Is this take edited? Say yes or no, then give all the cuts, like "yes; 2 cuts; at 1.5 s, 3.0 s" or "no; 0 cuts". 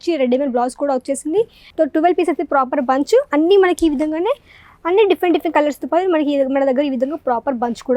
yes; 1 cut; at 1.6 s